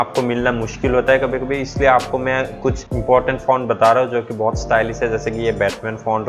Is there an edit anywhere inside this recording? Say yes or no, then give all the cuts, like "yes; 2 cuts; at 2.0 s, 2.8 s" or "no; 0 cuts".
yes; 1 cut; at 2.9 s